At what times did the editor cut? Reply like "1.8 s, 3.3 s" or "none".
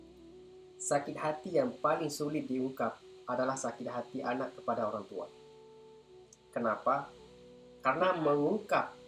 none